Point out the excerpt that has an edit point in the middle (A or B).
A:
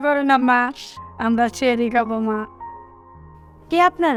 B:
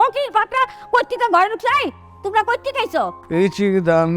B